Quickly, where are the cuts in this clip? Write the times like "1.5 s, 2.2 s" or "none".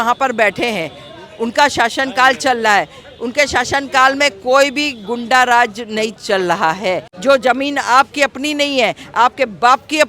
7.1 s